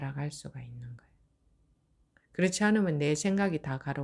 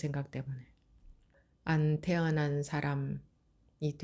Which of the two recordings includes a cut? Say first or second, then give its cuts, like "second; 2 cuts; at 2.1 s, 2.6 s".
second; 1 cut; at 1.4 s